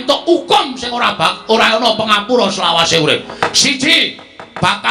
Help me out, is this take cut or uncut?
uncut